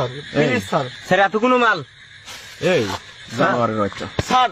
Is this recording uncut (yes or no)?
no